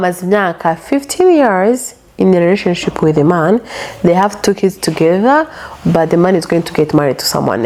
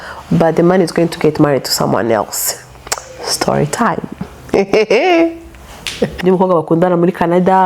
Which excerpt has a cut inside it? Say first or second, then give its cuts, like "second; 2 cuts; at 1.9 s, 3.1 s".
second; 1 cut; at 6.1 s